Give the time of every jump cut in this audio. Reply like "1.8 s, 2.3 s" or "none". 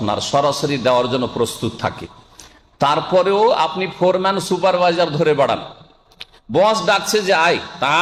none